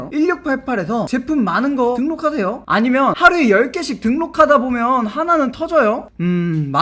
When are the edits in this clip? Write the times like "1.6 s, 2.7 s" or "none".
1.9 s